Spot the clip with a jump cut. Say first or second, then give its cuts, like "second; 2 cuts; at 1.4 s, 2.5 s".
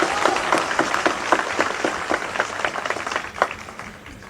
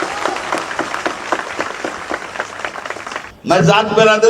second; 1 cut; at 3.3 s